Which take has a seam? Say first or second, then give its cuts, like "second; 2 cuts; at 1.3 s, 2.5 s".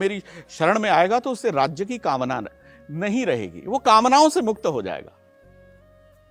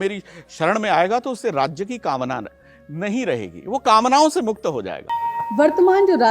second; 1 cut; at 5.0 s